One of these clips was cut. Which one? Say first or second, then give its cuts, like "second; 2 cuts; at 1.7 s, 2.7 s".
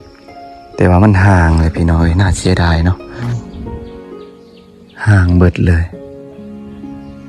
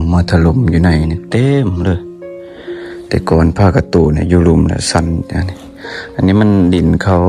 first; 1 cut; at 3.3 s